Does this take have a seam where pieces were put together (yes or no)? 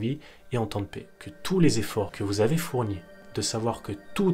yes